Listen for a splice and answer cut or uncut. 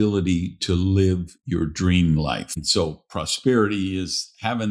cut